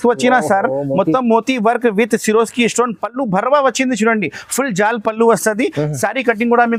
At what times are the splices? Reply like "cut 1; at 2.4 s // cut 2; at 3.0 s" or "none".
none